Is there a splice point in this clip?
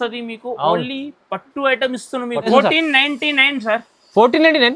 yes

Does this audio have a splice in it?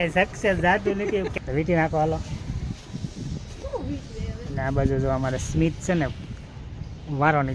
yes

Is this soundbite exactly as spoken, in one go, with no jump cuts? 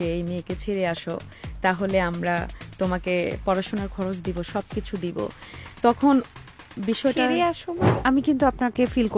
no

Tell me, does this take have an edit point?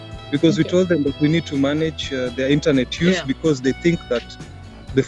no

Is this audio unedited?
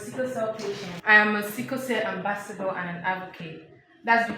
no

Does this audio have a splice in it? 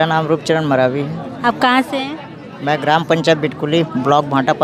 no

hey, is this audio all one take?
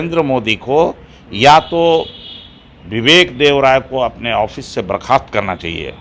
yes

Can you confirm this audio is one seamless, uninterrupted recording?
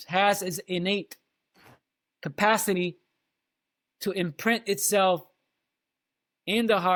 yes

